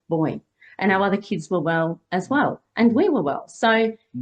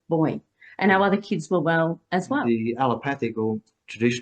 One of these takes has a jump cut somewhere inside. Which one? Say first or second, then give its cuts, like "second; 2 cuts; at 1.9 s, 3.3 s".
second; 1 cut; at 2.4 s